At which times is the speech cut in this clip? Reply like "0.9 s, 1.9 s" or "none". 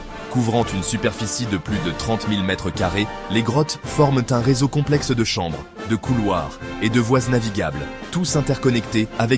none